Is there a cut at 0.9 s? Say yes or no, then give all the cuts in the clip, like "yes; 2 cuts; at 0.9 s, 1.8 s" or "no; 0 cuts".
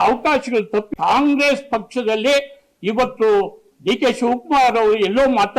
yes; 1 cut; at 0.9 s